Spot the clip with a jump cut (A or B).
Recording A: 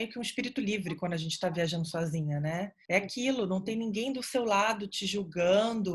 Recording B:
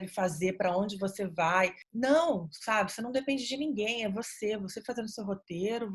B